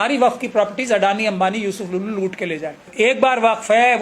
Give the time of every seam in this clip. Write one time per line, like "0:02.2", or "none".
0:02.8